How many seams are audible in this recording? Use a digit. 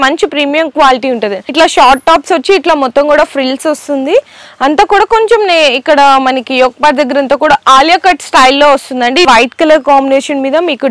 2